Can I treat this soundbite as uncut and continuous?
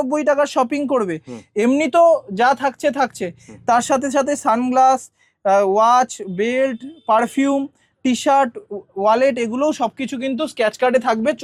yes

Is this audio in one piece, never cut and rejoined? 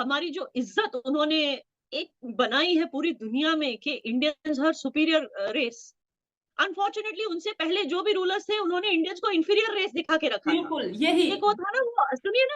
yes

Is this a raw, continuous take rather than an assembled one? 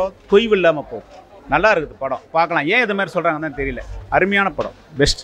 yes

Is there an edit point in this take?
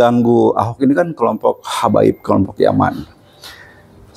no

